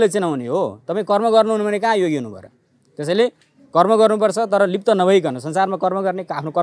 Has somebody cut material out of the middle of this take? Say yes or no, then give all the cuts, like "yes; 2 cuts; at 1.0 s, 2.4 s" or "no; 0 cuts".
no; 0 cuts